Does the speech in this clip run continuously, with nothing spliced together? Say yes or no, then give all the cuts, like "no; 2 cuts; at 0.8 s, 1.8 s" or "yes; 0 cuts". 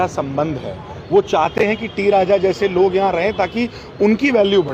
yes; 0 cuts